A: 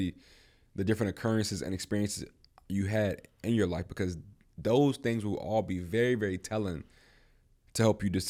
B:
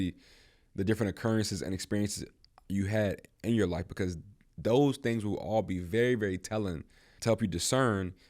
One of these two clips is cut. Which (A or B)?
B